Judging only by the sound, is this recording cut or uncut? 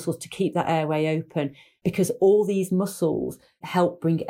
cut